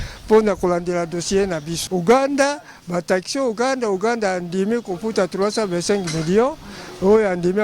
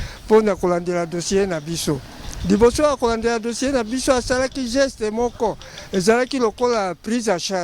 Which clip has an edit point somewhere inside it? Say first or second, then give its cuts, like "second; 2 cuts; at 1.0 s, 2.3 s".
first; 1 cut; at 1.7 s